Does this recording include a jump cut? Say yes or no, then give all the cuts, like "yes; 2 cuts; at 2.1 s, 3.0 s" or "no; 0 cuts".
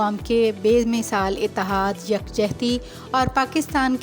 no; 0 cuts